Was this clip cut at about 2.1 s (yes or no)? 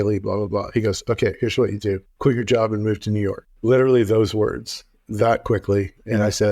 yes